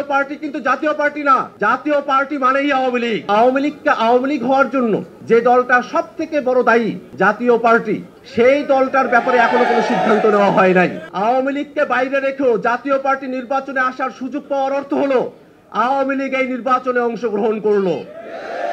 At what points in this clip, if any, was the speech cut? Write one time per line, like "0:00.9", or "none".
0:01.5
0:03.3
0:05.1
0:07.0
0:08.2
0:11.0

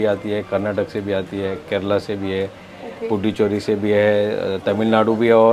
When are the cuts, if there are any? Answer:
none

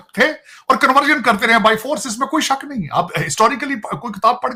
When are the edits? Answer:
none

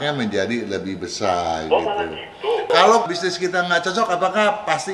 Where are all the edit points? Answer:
0:02.7

